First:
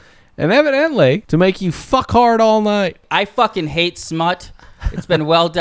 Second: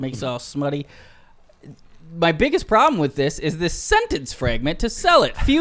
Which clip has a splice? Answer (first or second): first